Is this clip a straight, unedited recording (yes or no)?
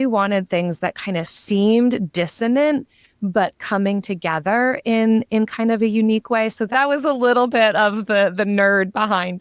no